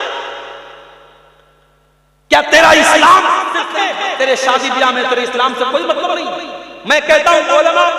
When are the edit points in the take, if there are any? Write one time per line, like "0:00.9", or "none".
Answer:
0:03.7